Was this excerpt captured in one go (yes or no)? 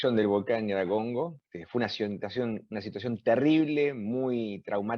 no